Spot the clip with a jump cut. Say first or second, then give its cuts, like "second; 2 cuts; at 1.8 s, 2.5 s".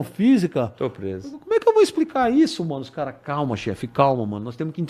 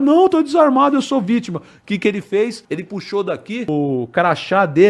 second; 2 cuts; at 2.6 s, 3.7 s